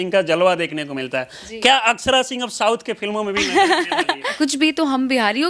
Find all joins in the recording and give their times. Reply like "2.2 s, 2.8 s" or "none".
4.3 s